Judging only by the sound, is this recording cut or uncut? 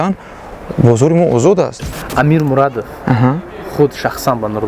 cut